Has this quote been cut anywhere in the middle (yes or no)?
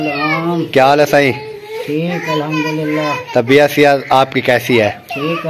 no